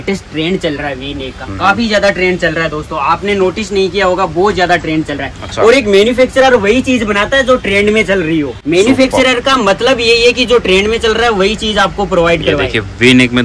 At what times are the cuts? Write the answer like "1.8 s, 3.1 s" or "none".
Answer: 8.6 s